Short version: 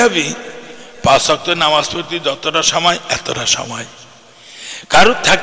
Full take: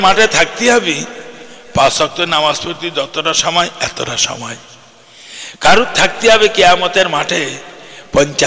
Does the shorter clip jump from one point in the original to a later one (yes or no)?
no